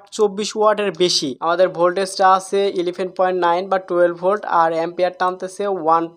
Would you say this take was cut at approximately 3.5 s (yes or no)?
no